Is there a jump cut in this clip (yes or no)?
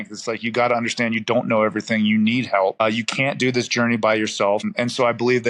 yes